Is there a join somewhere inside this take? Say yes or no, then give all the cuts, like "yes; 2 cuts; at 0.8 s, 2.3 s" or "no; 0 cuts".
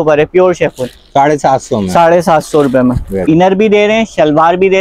yes; 1 cut; at 3.1 s